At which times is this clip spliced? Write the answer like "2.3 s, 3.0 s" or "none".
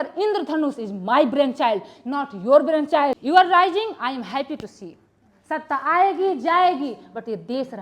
3.2 s